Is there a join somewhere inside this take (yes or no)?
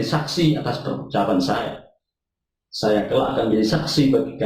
no